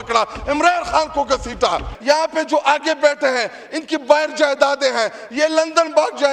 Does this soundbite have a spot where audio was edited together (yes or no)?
yes